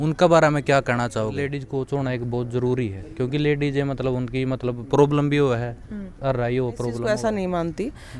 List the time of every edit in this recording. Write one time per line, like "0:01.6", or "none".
0:01.6
0:07.0